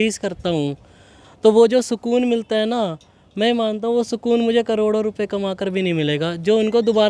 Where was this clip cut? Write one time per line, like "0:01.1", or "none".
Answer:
none

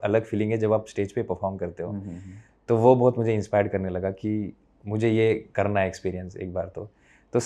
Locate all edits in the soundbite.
none

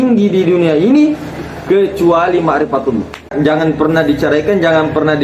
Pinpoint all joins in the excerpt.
0:03.3

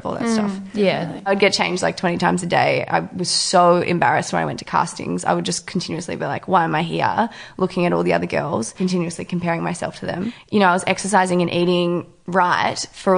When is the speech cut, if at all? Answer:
0:01.3
0:10.3

